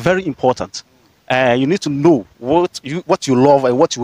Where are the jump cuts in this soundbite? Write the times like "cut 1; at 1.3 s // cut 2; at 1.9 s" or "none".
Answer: none